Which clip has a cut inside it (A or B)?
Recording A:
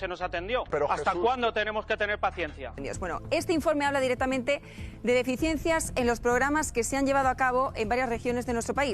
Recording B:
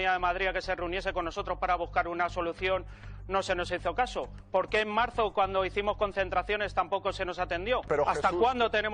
A